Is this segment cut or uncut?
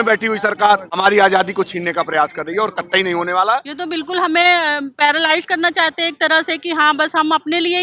cut